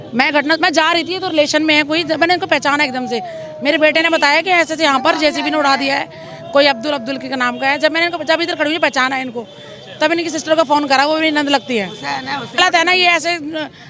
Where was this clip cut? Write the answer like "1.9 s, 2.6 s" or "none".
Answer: 12.6 s